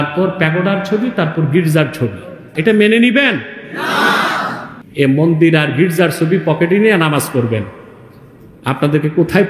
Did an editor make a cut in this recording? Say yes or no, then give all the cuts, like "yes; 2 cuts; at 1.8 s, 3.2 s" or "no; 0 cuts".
yes; 2 cuts; at 2.5 s, 4.7 s